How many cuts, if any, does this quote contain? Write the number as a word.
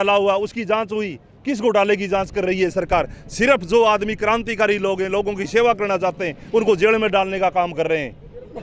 zero